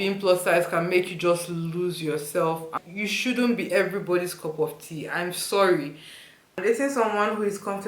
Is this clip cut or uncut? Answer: cut